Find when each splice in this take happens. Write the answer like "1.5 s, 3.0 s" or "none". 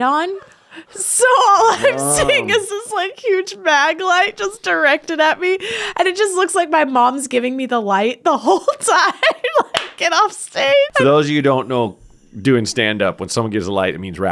10.9 s